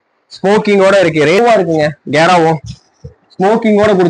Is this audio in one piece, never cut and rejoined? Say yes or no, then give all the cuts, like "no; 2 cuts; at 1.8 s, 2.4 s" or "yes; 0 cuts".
no; 1 cut; at 1.4 s